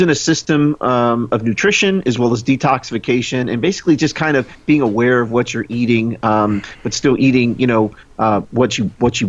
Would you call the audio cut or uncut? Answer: uncut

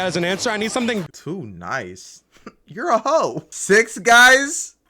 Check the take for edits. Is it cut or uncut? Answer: cut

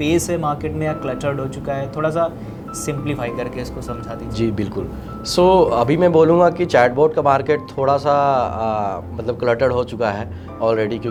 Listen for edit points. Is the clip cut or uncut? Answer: uncut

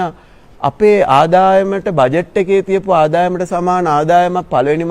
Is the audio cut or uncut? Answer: uncut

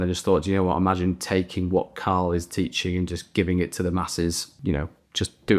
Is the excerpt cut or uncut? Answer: cut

